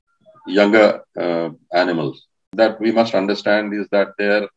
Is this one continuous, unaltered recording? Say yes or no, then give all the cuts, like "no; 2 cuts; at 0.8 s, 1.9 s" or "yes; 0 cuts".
no; 1 cut; at 2.5 s